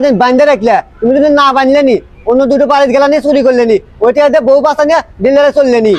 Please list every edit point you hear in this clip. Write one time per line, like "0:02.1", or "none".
none